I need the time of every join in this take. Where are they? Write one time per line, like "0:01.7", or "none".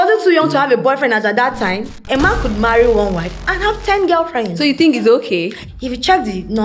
0:02.0
0:05.6

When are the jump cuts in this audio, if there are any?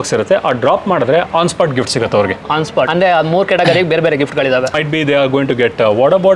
none

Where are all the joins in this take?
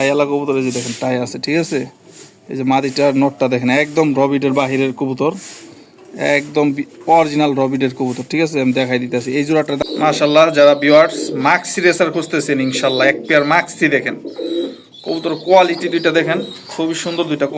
0:09.8

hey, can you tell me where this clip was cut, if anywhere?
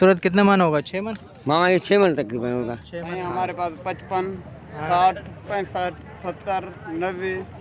0:03.0

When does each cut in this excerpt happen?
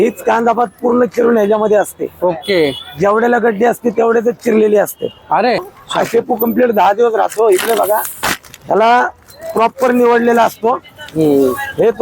0:05.8

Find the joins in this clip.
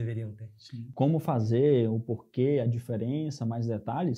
0:00.9

